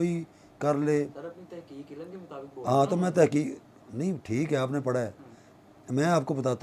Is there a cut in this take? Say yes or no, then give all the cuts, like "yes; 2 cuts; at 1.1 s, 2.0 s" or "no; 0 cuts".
no; 0 cuts